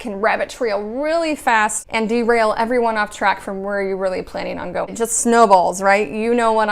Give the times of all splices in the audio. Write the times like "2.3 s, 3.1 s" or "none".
1.8 s, 4.9 s

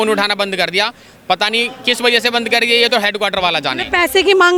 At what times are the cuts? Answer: none

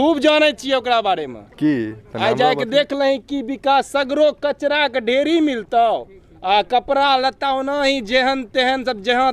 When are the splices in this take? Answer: none

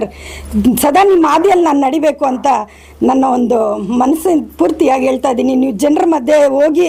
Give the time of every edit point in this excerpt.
none

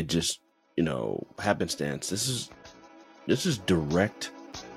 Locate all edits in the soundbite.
none

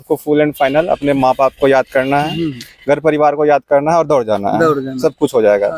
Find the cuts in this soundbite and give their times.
none

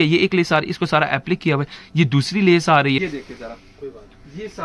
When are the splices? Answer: 3.0 s

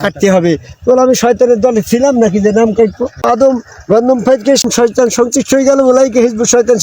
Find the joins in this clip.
3.2 s, 4.6 s

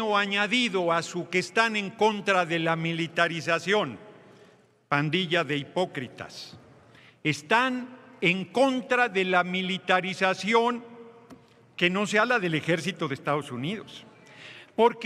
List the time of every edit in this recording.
none

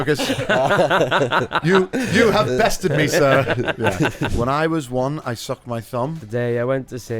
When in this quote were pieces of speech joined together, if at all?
4.2 s

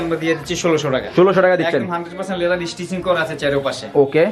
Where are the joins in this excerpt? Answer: none

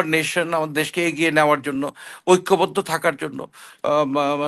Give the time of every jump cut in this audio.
none

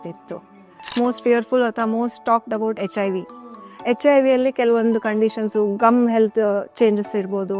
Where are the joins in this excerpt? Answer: 1.0 s

